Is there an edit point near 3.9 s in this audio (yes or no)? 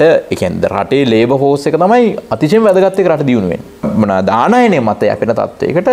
yes